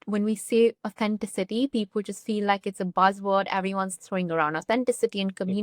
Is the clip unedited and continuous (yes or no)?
yes